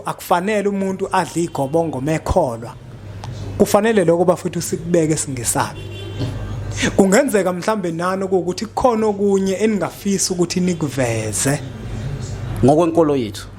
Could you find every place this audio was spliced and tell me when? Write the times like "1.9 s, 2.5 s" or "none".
12.5 s